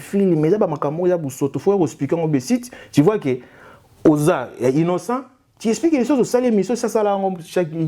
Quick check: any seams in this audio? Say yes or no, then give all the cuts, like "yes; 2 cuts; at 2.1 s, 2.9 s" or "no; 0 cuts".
no; 0 cuts